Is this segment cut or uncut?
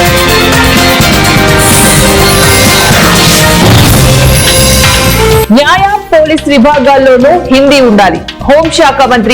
cut